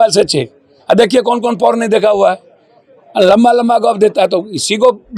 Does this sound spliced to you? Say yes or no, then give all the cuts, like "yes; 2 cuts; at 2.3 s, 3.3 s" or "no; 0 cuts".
no; 0 cuts